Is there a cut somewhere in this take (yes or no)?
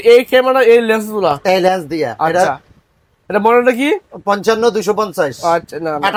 no